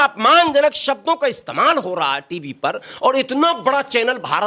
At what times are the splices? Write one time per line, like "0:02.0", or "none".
none